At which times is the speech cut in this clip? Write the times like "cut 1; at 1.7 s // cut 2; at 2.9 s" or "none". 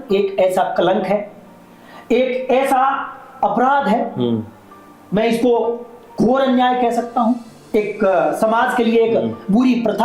none